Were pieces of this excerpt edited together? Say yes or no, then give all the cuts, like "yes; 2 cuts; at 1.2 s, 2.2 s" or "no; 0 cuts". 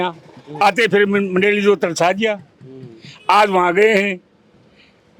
no; 0 cuts